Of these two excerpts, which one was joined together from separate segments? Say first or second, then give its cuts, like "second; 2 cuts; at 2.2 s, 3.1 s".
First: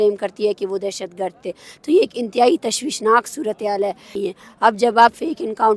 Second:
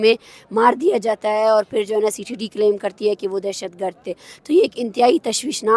first; 1 cut; at 4.1 s